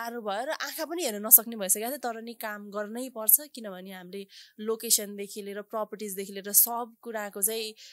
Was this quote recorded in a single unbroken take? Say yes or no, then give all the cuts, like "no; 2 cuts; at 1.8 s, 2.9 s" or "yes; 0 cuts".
yes; 0 cuts